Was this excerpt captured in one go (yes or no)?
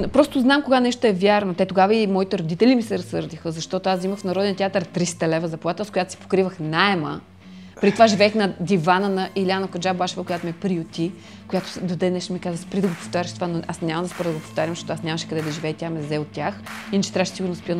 yes